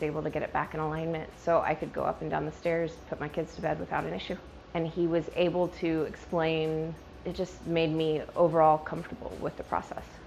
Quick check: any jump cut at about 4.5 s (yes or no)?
yes